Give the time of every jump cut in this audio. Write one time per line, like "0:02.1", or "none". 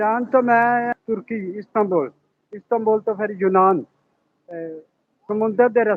0:00.9